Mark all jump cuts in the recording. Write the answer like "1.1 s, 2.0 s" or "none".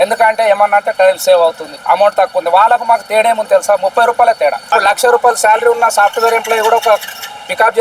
1.7 s, 4.6 s

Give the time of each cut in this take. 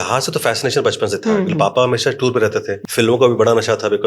2.8 s

